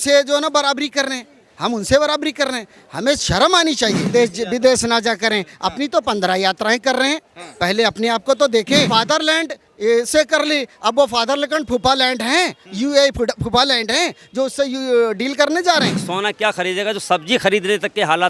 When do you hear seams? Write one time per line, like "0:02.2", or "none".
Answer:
0:04.1
0:08.9
0:16.0